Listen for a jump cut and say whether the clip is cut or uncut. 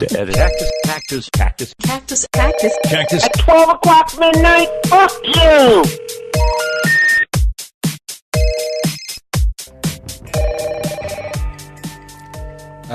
uncut